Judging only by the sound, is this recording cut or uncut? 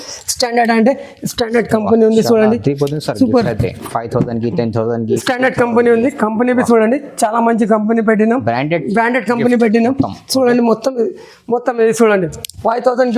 uncut